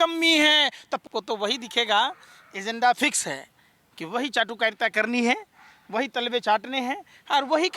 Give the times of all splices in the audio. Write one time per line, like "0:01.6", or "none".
0:01.1